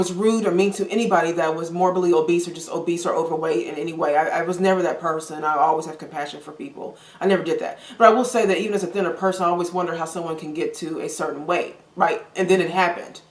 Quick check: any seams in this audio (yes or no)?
no